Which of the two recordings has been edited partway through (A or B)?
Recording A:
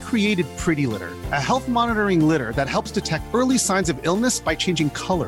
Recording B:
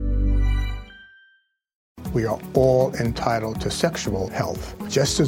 B